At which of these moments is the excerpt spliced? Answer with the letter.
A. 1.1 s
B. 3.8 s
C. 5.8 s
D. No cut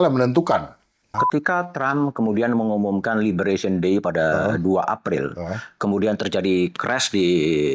A